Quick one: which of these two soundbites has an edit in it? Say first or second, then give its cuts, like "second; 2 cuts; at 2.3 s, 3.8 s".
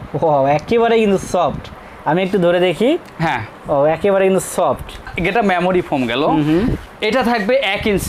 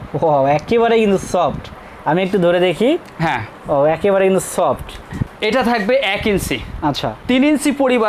second; 1 cut; at 5.2 s